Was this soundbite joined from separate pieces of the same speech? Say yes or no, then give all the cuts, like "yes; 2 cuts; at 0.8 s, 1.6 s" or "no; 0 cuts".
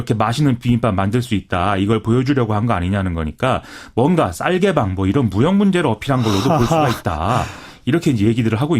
yes; 1 cut; at 1.2 s